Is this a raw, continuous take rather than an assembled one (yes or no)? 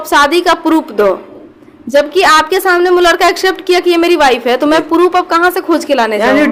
yes